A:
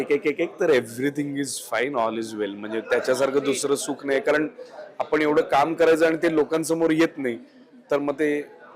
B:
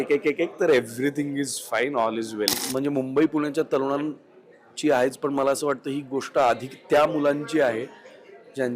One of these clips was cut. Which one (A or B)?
B